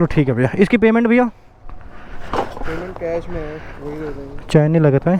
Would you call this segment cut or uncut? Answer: uncut